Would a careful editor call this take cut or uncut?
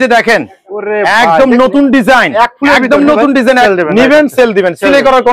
cut